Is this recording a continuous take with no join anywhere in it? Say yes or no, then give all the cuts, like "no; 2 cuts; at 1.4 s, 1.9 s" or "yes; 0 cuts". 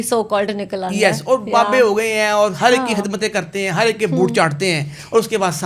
yes; 0 cuts